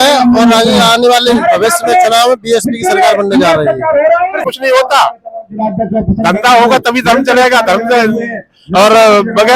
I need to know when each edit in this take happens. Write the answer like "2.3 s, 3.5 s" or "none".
4.4 s